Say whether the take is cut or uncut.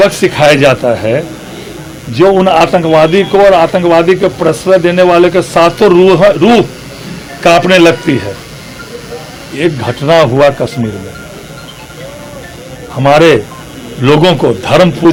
uncut